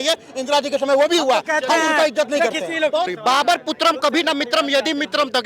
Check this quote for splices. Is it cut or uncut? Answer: cut